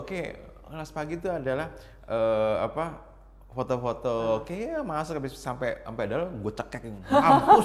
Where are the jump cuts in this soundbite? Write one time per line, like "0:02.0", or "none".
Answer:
none